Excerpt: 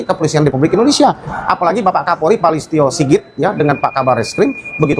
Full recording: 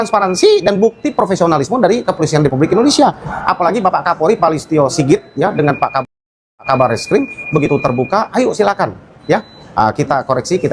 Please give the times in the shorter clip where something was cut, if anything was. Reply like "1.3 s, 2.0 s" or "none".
4.0 s